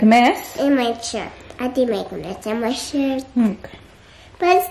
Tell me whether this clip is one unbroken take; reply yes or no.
yes